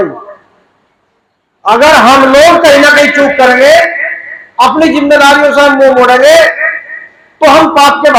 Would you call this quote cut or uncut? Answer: uncut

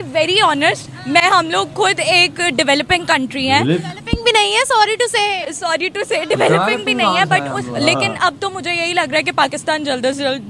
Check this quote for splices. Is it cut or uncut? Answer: cut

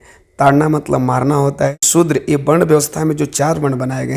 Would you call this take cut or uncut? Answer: cut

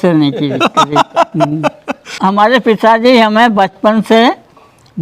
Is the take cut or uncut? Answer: cut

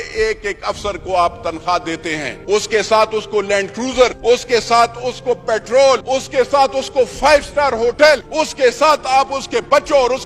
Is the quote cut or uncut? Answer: cut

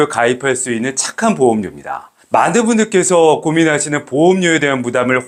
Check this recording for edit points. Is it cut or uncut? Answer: uncut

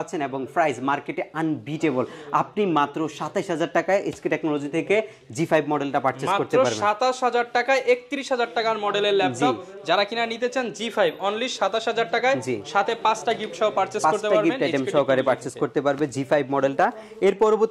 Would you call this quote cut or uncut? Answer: uncut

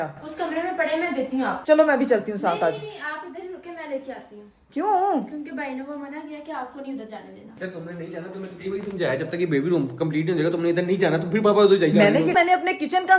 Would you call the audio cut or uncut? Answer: cut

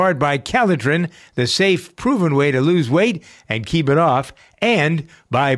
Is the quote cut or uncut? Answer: uncut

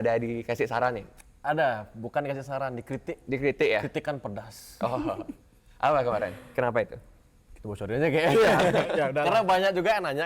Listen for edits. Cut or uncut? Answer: uncut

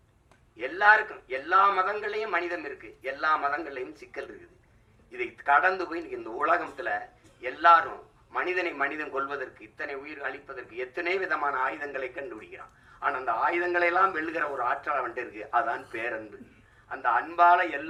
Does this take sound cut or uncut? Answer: uncut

